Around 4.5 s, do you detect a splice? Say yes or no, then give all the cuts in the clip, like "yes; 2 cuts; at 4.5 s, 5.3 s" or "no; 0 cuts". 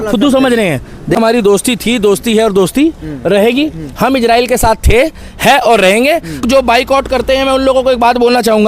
no; 2 cuts; at 1.2 s, 6.4 s